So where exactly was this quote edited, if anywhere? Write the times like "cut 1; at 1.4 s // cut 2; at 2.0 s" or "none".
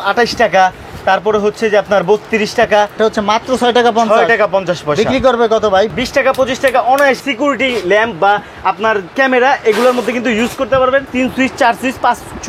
cut 1; at 3.0 s // cut 2; at 5.9 s // cut 3; at 7.2 s // cut 4; at 11.1 s